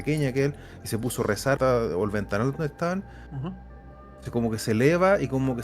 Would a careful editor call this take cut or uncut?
cut